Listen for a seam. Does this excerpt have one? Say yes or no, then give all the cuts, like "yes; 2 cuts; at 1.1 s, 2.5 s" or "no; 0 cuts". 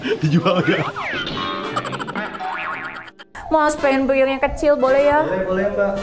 yes; 1 cut; at 3.3 s